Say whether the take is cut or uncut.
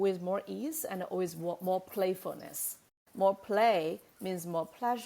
cut